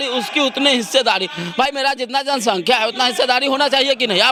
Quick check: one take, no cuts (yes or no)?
yes